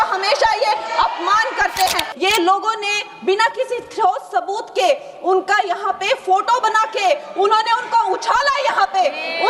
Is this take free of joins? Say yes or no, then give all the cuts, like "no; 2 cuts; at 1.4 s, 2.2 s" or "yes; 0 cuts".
no; 1 cut; at 2.1 s